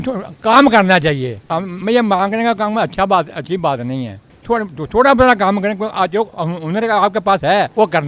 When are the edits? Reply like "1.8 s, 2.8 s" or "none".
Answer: none